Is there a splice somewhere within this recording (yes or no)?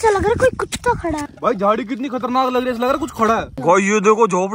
yes